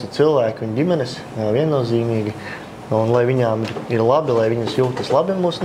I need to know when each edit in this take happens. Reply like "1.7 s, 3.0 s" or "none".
none